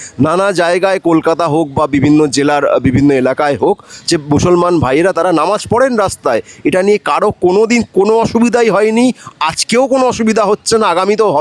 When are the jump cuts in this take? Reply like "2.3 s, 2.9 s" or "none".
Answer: none